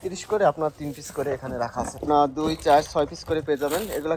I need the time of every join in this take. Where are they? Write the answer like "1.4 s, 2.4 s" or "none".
2.0 s